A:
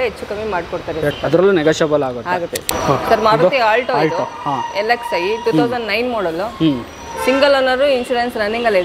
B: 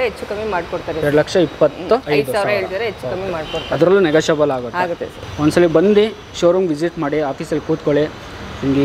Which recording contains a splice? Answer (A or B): A